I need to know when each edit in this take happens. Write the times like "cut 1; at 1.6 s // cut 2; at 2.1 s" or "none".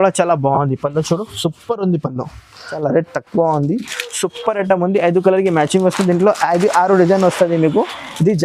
cut 1; at 2.7 s